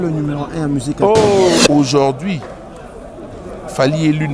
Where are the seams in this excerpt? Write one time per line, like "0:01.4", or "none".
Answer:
0:01.6